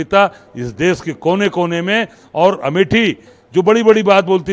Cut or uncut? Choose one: cut